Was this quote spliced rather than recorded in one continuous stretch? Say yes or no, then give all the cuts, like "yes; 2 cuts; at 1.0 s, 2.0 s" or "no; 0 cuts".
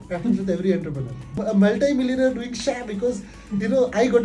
yes; 1 cut; at 1.3 s